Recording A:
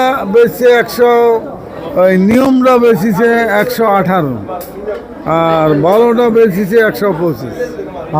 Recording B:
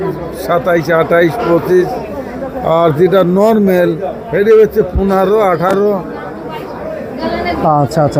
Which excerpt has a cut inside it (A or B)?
A